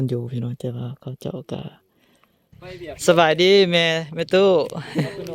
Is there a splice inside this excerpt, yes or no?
yes